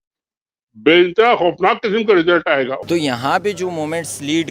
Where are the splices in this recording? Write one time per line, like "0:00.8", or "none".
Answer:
0:02.8